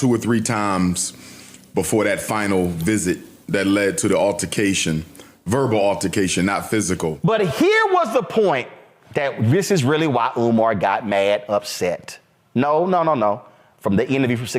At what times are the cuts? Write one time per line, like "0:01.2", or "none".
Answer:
0:07.2